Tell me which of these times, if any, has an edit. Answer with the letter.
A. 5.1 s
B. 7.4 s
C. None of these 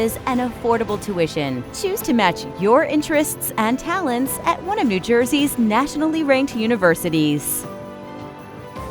B